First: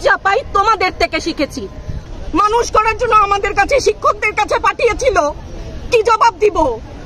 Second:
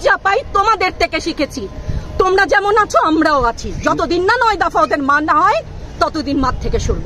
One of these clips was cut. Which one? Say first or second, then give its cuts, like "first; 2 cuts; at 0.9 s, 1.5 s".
first; 1 cut; at 2.0 s